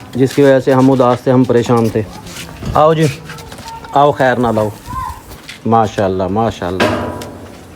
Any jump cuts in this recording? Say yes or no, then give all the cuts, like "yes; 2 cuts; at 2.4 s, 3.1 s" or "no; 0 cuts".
no; 0 cuts